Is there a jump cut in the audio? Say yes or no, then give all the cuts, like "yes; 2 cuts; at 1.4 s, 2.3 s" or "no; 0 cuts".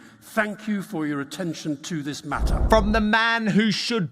yes; 1 cut; at 2.5 s